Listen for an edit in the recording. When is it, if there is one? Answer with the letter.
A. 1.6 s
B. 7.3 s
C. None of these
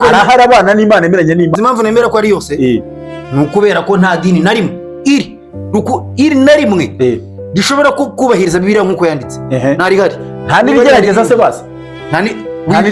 A